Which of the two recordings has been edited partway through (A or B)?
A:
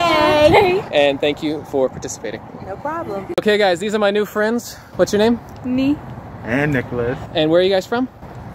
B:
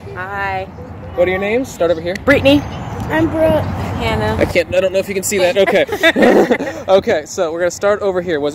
A